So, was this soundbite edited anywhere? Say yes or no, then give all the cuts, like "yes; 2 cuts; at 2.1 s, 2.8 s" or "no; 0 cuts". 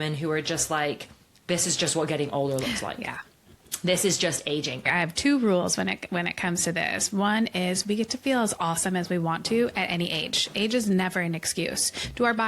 yes; 1 cut; at 4.8 s